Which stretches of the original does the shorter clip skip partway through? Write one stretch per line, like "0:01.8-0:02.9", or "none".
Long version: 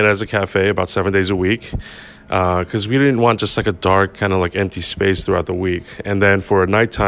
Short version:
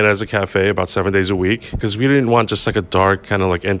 0:01.8-0:02.7